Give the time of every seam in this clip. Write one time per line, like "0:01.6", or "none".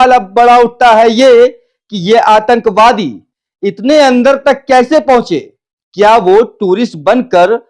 none

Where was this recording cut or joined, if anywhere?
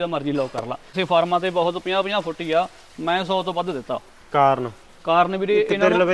0:01.0

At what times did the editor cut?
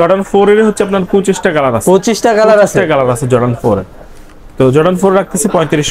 none

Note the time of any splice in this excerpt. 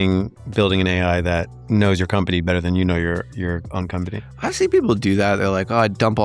0:01.5

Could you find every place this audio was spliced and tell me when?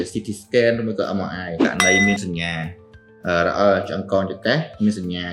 0:01.7

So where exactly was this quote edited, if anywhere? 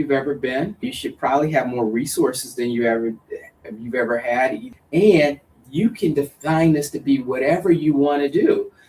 0:00.9
0:04.7

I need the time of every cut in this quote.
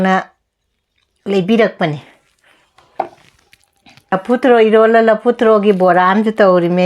0:04.1

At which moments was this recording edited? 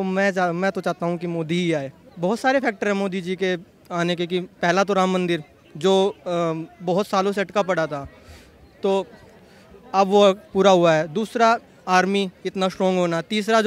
0:02.0

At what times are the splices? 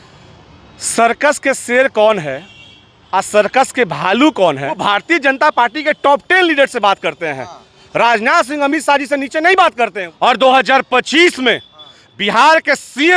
0:04.8
0:10.0

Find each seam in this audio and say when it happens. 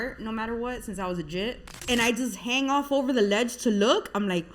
0:01.8

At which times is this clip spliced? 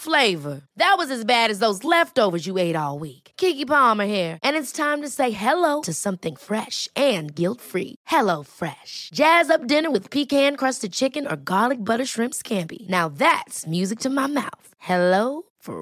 none

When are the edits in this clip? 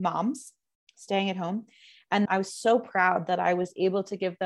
0:02.2

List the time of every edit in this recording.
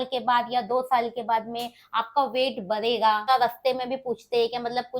0:03.3

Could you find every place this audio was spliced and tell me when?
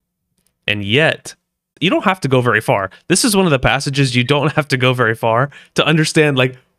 0:01.7

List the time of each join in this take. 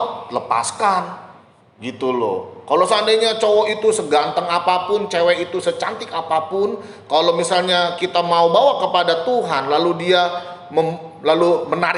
none

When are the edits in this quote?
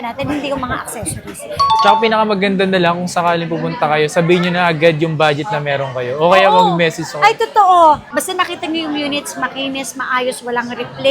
0:01.8
0:08.0

